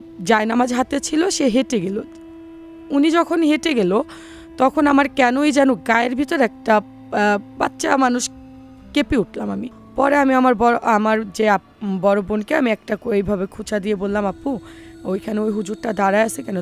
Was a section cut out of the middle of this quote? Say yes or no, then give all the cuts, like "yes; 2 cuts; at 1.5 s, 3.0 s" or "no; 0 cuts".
yes; 1 cut; at 9.8 s